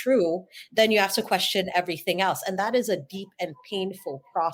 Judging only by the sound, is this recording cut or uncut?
uncut